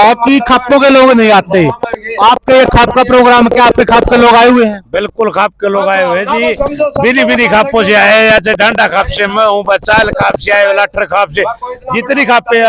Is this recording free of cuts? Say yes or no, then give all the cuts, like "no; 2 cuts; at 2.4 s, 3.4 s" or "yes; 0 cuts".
yes; 0 cuts